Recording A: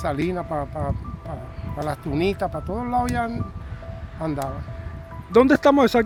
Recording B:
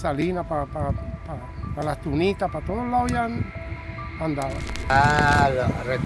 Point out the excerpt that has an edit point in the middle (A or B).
B